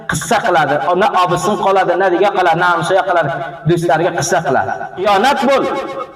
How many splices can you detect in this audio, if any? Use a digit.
1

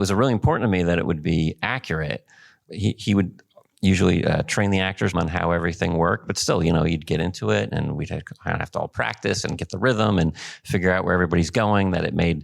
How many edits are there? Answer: 2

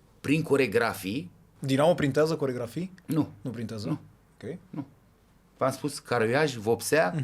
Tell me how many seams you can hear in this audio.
1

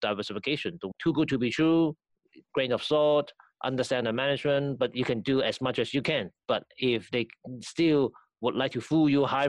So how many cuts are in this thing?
1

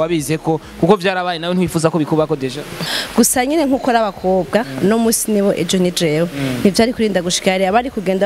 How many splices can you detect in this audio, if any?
1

